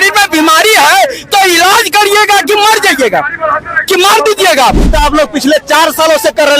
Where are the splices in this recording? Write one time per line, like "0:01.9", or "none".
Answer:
0:04.9